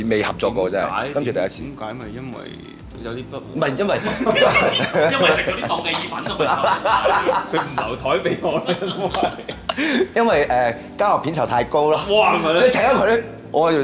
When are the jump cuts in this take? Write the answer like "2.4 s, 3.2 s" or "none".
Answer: none